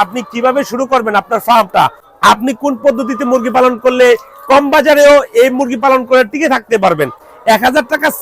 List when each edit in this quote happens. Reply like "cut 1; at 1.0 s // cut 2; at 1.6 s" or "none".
cut 1; at 2.0 s // cut 2; at 7.3 s